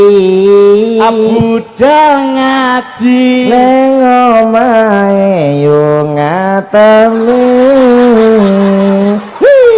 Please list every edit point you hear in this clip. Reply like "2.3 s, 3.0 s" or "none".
none